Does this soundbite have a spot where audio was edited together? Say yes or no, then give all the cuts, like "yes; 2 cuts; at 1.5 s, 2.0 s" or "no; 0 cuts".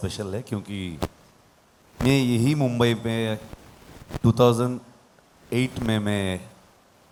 no; 0 cuts